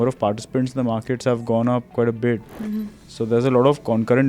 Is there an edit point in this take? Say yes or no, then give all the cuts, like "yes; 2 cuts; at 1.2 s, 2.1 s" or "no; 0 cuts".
no; 0 cuts